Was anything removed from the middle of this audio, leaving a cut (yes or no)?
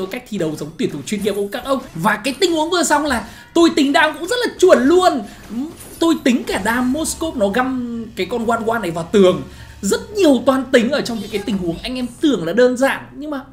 yes